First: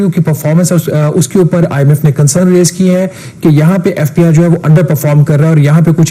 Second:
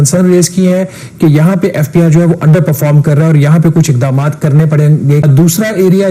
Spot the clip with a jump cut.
second; 1 cut; at 5.2 s

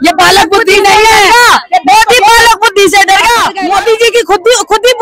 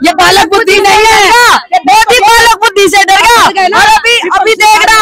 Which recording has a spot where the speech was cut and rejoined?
first; 1 cut; at 3.5 s

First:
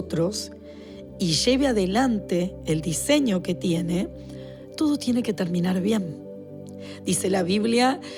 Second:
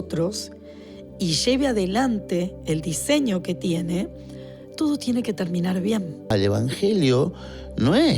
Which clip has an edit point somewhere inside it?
second; 1 cut; at 6.3 s

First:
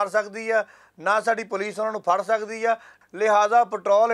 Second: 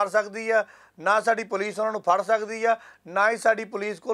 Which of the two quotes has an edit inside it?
first; 1 cut; at 3.0 s

